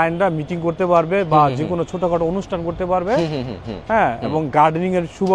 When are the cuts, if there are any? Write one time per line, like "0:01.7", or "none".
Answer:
none